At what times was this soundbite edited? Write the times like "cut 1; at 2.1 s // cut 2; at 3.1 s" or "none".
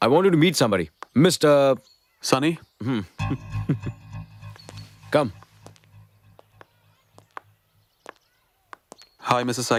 none